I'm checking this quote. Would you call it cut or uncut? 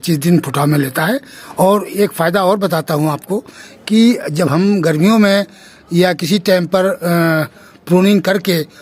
cut